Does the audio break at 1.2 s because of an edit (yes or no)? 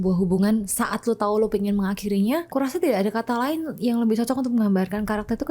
no